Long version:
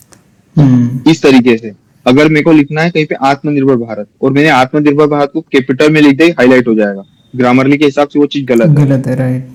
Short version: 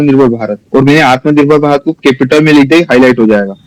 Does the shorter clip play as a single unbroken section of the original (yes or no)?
yes